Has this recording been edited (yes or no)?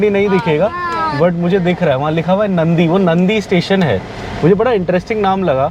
no